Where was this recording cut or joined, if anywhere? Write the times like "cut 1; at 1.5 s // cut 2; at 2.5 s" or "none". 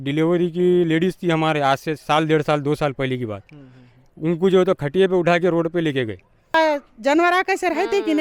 cut 1; at 6.5 s